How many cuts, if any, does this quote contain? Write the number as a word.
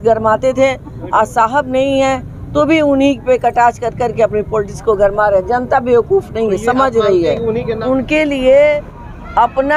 one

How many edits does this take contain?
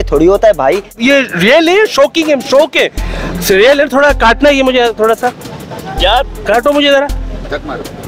one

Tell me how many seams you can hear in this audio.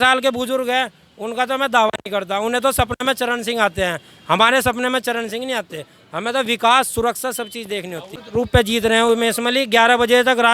one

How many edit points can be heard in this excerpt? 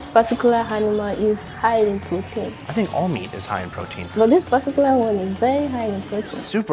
two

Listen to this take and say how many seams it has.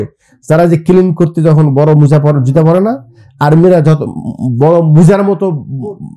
zero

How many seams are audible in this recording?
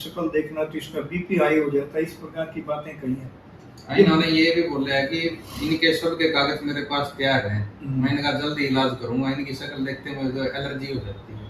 zero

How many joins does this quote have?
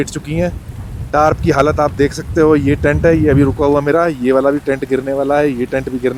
zero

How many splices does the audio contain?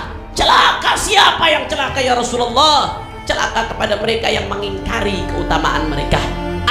zero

